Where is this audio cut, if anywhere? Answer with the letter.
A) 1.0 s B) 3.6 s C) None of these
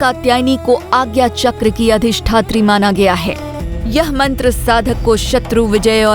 B